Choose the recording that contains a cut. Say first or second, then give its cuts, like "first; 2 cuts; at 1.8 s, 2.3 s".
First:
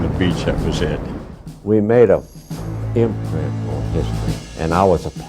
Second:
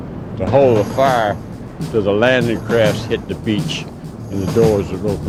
first; 1 cut; at 1.3 s